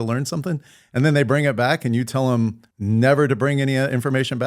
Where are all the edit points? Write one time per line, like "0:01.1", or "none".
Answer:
0:02.7